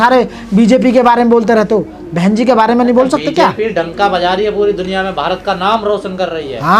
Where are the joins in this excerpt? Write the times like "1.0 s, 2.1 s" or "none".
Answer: none